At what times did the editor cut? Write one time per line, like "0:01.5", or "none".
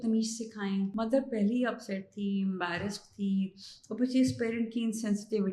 0:00.9